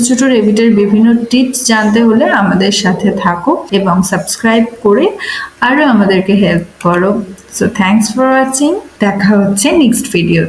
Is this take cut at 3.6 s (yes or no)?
yes